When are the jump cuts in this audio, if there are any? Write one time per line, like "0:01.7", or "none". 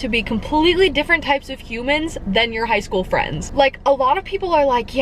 none